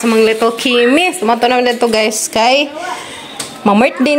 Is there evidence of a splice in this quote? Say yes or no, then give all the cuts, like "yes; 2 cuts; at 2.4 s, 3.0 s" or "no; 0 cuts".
no; 0 cuts